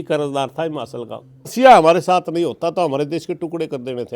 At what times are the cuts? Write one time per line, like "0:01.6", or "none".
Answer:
0:01.5